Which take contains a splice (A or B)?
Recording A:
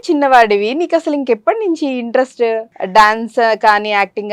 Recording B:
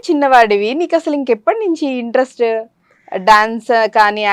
A